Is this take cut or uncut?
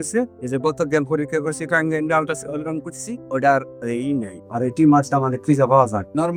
uncut